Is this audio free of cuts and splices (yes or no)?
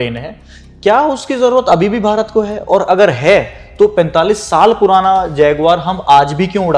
yes